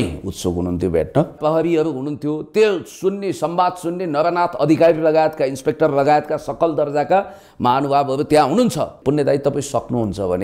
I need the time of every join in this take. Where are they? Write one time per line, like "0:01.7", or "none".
0:01.3
0:09.0